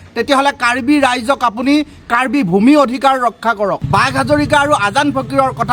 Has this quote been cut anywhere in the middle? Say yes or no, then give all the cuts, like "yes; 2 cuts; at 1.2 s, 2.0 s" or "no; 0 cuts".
yes; 1 cut; at 3.8 s